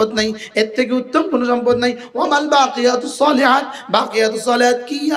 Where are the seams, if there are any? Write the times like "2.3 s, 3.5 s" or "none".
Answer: none

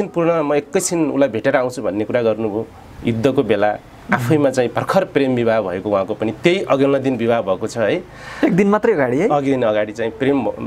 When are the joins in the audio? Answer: none

